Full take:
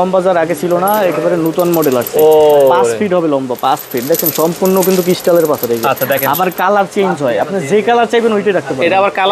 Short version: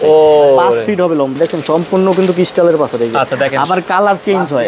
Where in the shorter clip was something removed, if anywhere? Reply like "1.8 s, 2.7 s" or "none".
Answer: 1.3 s